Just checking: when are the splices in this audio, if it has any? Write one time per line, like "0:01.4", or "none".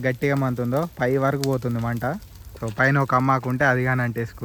none